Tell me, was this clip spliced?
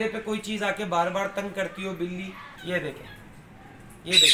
yes; 1 cut; at 2.4 s

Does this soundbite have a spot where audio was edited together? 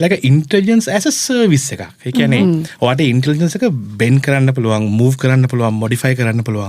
no; 0 cuts

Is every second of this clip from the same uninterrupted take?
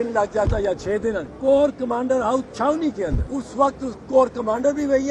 no; 2 cuts; at 1.3 s, 3.3 s

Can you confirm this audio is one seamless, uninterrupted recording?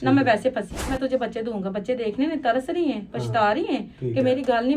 no; 1 cut; at 0.9 s

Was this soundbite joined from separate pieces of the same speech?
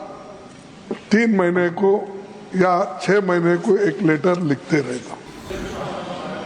yes; 1 cut; at 5.4 s

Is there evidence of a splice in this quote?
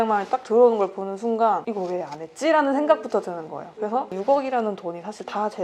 no; 0 cuts

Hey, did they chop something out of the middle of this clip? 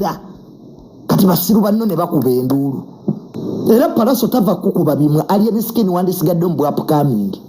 yes; 1 cut; at 3.3 s

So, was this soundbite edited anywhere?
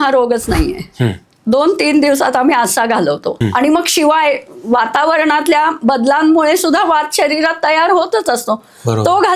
yes; 1 cut; at 3.4 s

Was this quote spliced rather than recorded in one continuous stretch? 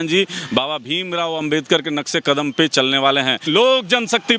yes; 1 cut; at 3.4 s

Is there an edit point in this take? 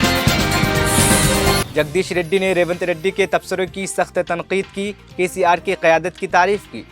yes; 1 cut; at 1.7 s

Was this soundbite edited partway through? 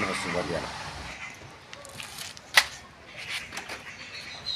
yes; 1 cut; at 1.1 s

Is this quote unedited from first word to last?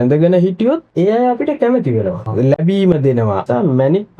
no; 3 cuts; at 0.9 s, 2.2 s, 3.4 s

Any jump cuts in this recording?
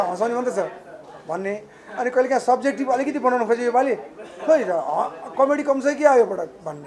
no; 0 cuts

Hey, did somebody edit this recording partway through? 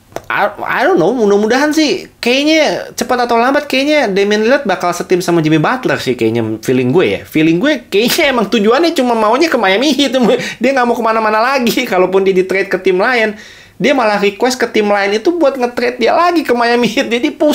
no; 0 cuts

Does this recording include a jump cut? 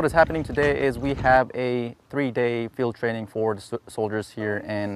no; 0 cuts

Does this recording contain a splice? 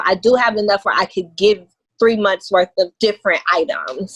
no; 0 cuts

